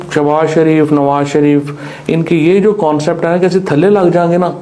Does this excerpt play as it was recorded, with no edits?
yes; 0 cuts

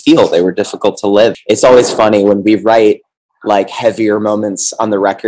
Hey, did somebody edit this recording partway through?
yes; 1 cut; at 1.4 s

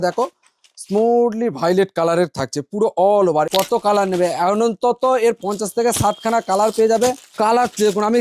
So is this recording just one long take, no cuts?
no; 3 cuts; at 3.5 s, 5.4 s, 7.2 s

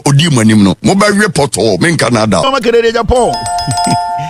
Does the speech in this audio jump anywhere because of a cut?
yes; 1 cut; at 2.5 s

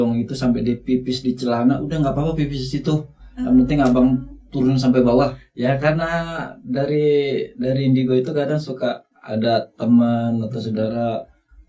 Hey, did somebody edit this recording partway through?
yes; 1 cut; at 5.5 s

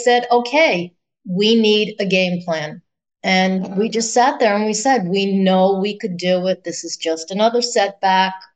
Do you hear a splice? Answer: no; 0 cuts

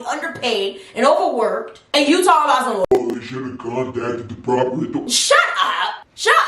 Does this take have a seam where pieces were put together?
no; 0 cuts

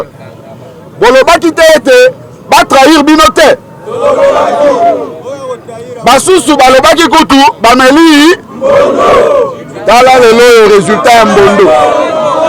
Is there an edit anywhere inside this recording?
no; 0 cuts

